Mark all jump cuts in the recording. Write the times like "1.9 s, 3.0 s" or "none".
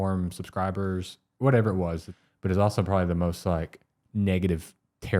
2.1 s, 4.0 s